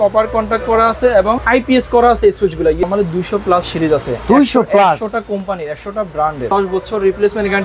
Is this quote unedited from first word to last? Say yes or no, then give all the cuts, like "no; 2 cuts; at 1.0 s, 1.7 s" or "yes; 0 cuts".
no; 3 cuts; at 1.4 s, 2.8 s, 6.4 s